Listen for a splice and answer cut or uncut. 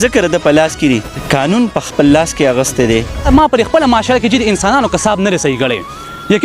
cut